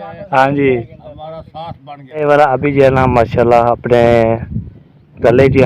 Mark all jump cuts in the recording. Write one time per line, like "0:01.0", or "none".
0:02.1